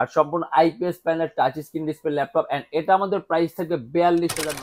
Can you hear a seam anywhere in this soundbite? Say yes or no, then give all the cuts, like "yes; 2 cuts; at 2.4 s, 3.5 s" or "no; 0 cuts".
no; 0 cuts